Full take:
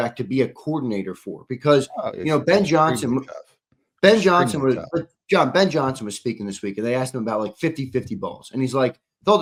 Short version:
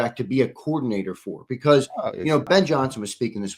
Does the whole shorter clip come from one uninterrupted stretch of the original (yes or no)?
no